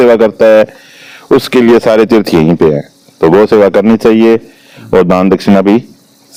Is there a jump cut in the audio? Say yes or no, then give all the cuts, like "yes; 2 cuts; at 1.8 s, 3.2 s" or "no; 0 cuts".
no; 0 cuts